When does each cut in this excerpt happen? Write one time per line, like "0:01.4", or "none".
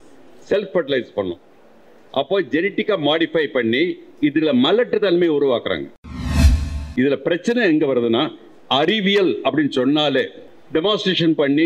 0:06.5
0:10.4